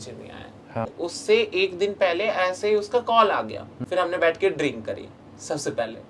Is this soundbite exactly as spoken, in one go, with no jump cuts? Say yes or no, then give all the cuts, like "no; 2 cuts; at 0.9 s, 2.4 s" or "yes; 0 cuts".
no; 2 cuts; at 0.9 s, 3.7 s